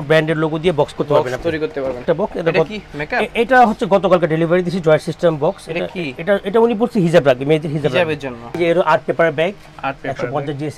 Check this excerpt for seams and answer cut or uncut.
cut